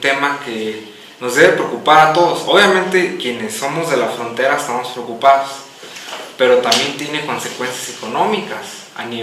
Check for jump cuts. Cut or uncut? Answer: cut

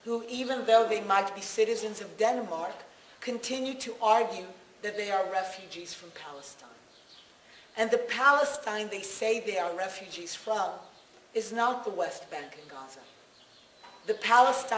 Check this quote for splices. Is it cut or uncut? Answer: uncut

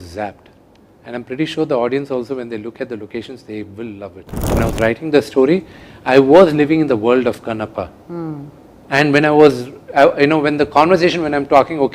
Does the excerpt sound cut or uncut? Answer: cut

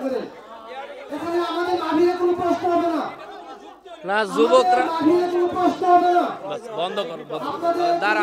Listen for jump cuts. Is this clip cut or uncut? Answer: cut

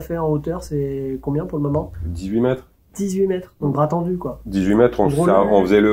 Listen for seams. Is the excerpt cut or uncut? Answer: uncut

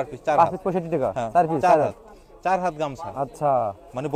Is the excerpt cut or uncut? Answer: uncut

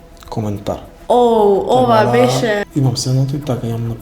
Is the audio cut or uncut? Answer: cut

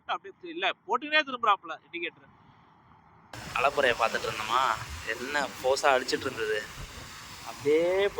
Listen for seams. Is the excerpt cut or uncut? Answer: cut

